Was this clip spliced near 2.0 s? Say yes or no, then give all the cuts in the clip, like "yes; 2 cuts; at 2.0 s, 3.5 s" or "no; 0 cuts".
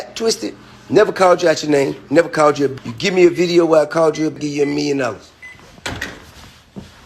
yes; 3 cuts; at 2.0 s, 2.9 s, 5.4 s